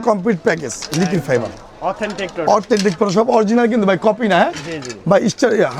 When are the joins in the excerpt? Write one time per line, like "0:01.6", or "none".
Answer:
none